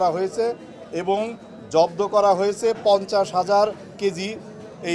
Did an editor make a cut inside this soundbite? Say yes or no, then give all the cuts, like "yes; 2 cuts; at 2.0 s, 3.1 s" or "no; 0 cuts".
no; 0 cuts